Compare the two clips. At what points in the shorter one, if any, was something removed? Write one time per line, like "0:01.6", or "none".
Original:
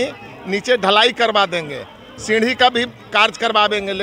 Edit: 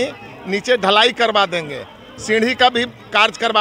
none